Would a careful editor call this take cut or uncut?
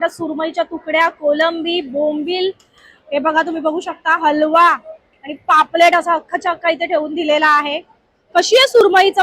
uncut